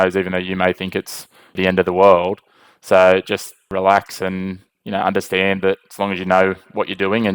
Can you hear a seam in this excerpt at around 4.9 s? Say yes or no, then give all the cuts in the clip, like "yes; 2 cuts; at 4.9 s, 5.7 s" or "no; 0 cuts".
no; 2 cuts; at 1.6 s, 3.7 s